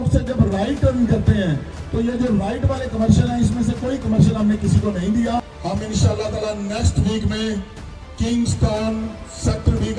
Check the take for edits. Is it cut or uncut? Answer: cut